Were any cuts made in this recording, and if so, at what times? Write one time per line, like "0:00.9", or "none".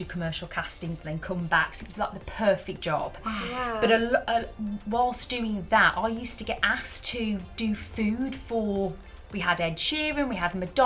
none